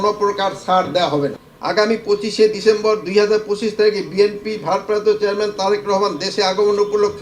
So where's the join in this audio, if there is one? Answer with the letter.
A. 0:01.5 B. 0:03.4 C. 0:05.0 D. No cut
A